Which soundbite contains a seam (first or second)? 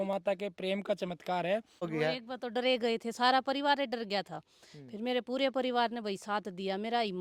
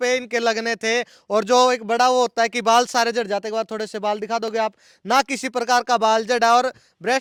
first